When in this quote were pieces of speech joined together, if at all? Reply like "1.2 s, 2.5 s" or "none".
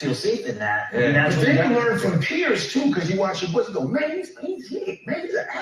2.6 s